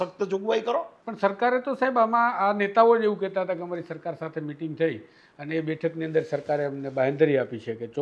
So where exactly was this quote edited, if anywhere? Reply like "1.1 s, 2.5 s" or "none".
1.0 s